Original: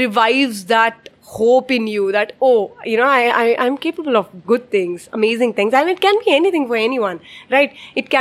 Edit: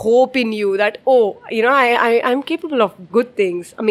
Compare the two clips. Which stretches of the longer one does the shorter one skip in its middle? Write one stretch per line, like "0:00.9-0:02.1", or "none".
none